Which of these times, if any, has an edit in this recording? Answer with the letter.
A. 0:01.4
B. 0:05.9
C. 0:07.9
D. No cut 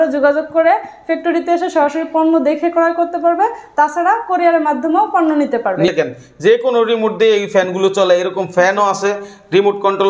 B